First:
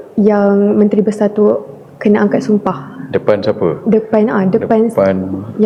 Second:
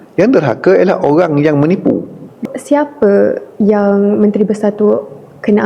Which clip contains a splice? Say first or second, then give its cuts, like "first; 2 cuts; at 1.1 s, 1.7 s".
second; 1 cut; at 2.4 s